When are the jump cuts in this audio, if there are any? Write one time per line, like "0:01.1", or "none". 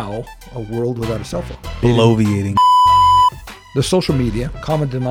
0:01.7
0:02.4
0:03.5